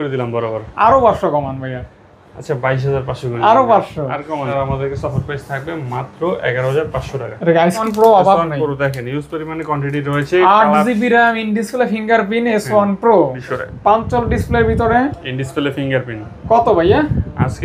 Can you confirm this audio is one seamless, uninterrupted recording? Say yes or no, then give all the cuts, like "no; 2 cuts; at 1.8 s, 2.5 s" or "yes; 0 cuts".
no; 3 cuts; at 4.5 s, 7.8 s, 13.4 s